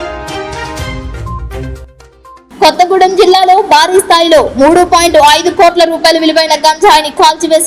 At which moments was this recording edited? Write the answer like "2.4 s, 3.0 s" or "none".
1.3 s